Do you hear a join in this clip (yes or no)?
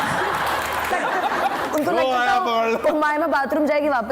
yes